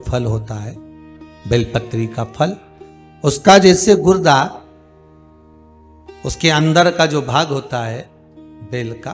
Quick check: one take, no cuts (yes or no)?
no